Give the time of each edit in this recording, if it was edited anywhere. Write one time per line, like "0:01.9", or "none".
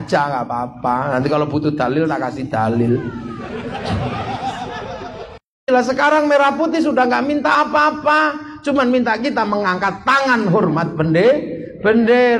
0:05.7